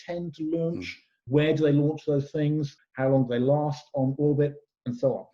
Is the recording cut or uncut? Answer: cut